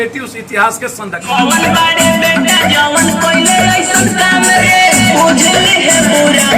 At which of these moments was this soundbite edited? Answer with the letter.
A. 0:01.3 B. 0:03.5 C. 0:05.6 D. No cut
A